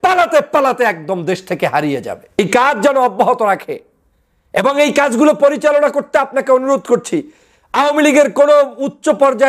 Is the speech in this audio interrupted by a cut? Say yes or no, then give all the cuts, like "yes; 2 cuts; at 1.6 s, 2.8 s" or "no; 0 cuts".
yes; 1 cut; at 2.4 s